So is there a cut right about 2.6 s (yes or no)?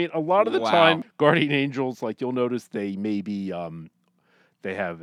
no